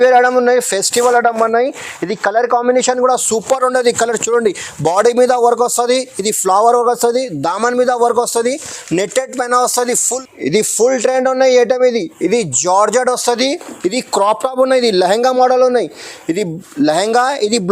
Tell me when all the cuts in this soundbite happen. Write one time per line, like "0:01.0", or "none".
0:10.0